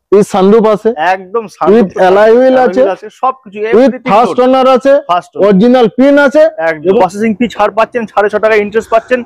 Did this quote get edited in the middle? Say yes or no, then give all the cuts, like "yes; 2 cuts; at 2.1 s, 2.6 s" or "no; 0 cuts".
yes; 1 cut; at 7.0 s